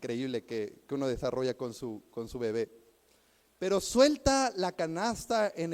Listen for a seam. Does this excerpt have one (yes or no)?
no